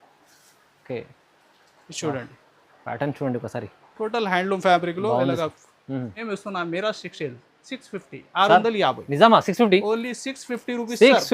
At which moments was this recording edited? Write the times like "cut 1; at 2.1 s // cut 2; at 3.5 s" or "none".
cut 1; at 6.1 s